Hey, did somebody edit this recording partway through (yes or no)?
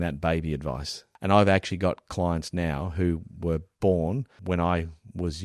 yes